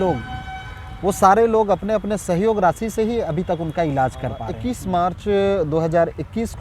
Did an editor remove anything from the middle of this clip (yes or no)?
yes